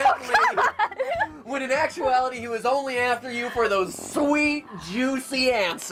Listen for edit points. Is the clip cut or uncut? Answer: uncut